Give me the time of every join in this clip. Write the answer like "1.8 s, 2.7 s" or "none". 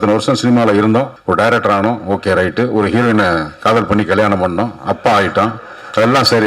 1.2 s